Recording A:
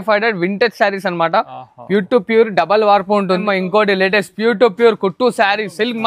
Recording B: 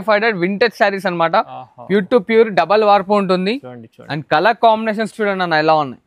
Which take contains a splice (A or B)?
A